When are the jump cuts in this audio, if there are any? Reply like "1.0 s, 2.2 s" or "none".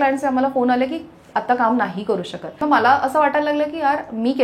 2.6 s